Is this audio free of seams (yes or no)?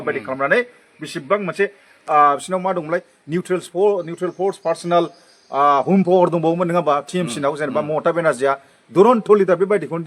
yes